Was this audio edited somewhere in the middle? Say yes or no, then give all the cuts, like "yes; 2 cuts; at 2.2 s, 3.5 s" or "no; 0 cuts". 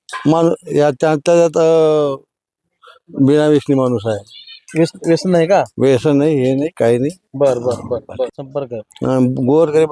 yes; 1 cut; at 8.4 s